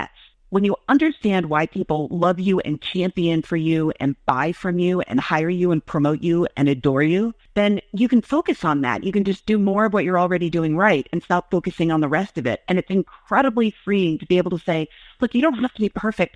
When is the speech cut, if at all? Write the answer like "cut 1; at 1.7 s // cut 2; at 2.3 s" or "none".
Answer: cut 1; at 7.4 s